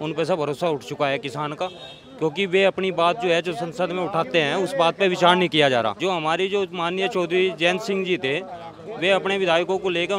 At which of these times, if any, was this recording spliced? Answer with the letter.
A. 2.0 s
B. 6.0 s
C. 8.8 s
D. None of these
B